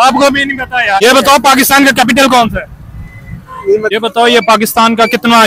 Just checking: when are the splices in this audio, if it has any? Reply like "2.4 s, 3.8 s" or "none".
1.0 s, 3.9 s